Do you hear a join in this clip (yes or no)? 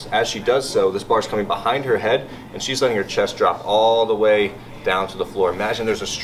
no